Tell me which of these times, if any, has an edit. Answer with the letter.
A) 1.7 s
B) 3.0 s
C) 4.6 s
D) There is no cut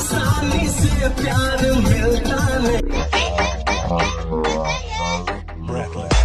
B